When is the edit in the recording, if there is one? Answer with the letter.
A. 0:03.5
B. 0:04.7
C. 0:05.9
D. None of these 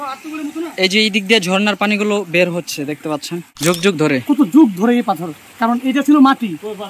A